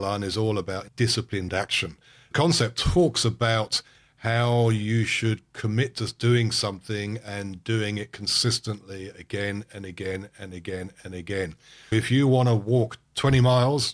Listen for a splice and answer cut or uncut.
cut